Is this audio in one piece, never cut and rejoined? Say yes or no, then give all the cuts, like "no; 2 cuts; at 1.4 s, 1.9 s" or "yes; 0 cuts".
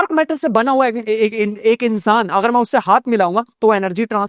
yes; 0 cuts